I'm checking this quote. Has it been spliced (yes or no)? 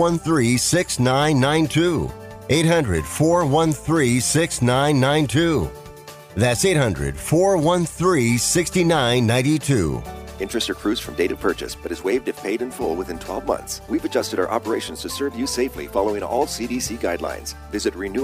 yes